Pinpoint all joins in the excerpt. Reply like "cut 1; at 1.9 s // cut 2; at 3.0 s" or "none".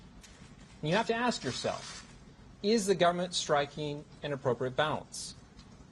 cut 1; at 3.6 s